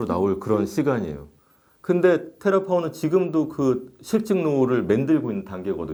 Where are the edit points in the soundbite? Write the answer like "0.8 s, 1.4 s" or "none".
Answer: none